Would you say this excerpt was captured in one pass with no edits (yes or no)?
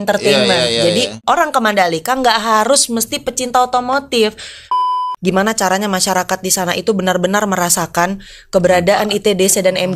no